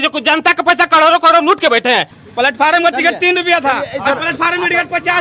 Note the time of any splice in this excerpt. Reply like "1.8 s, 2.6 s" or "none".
2.2 s